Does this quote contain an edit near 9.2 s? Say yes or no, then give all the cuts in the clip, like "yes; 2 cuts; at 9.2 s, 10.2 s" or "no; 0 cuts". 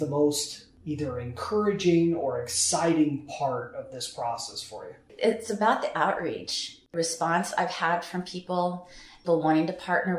yes; 2 cuts; at 6.9 s, 9.2 s